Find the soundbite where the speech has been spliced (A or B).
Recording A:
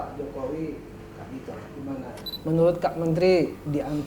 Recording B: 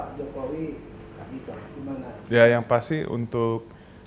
A